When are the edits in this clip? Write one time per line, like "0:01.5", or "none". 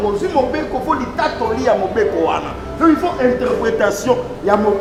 none